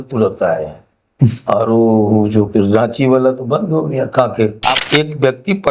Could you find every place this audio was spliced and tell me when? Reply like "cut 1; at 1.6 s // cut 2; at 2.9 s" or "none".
cut 1; at 4.8 s